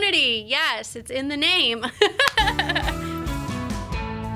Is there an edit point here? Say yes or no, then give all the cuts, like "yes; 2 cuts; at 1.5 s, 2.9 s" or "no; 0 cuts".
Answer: yes; 1 cut; at 2.8 s